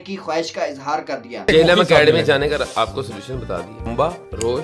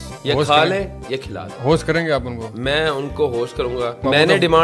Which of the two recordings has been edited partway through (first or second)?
first